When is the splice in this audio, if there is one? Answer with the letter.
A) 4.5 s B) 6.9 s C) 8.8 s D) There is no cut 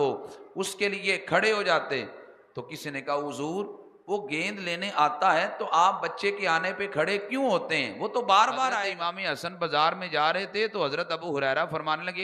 C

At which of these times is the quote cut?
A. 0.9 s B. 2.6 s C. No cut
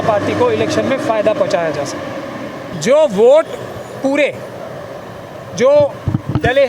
B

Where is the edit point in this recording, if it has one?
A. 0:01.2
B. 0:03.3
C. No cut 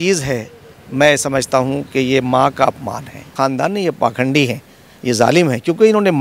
B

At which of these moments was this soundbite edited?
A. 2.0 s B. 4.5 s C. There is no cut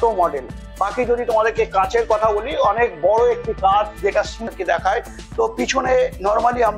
B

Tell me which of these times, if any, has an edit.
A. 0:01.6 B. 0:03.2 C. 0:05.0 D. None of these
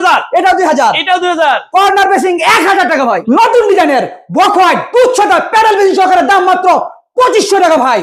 B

